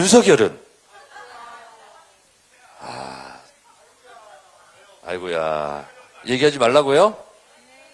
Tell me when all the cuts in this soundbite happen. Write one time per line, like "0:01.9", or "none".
none

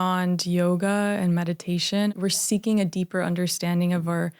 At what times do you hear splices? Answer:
0:02.1

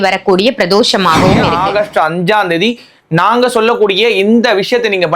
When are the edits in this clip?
0:01.5

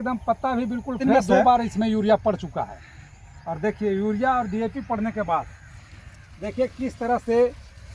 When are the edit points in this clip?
0:01.4

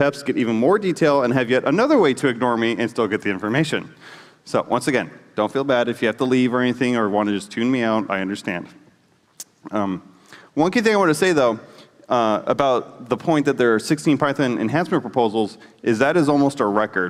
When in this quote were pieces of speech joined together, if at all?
none

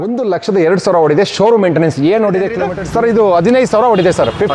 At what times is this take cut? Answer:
0:02.7

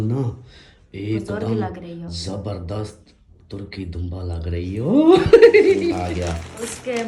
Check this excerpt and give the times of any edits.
0:06.0

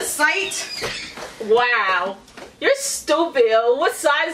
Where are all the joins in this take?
none

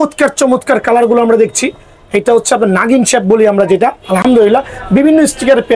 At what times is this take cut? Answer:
none

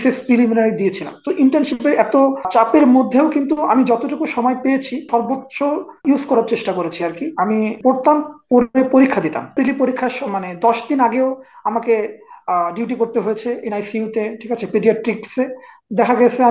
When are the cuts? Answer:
0:02.5
0:05.4
0:07.8
0:09.5

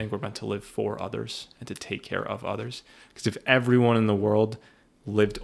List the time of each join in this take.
none

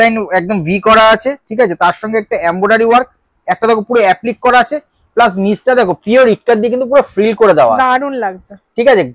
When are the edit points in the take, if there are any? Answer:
none

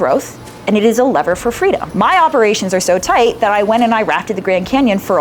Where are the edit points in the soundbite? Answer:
0:01.9

